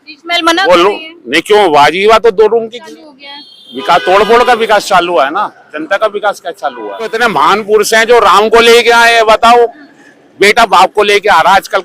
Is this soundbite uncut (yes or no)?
no